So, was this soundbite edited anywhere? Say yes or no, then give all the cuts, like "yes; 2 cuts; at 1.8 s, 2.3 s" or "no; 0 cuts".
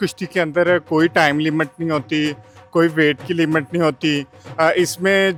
no; 0 cuts